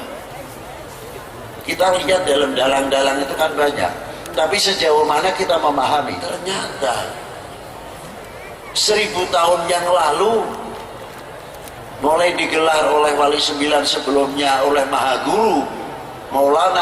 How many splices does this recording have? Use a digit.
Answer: 1